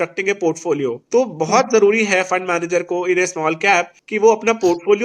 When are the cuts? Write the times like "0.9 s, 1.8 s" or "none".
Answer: 1.0 s, 4.0 s